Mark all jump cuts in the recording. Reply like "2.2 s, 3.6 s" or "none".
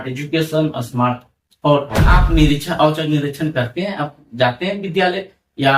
2.2 s